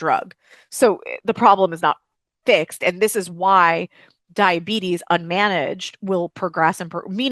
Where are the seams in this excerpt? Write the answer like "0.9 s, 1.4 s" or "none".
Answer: none